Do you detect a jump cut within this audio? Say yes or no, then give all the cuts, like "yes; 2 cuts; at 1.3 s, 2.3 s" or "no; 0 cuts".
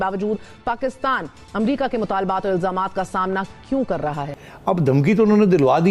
yes; 1 cut; at 4.3 s